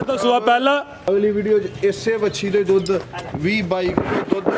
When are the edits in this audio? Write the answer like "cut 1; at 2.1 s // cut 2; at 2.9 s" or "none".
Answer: cut 1; at 1.0 s